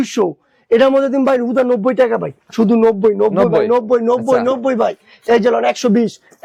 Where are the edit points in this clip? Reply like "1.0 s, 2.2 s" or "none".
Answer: none